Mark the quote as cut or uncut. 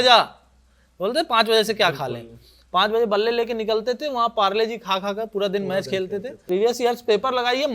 cut